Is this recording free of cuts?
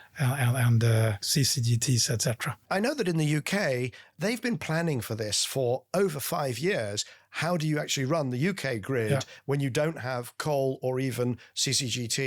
no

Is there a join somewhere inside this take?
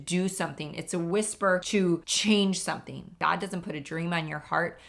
yes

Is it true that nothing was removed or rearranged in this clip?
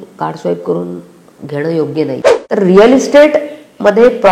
no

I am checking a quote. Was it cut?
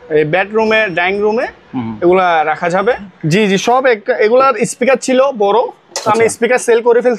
yes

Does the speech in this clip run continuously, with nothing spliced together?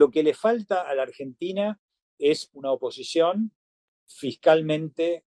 yes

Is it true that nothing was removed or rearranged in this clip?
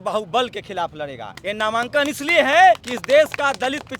no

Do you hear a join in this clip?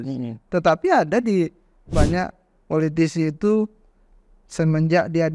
yes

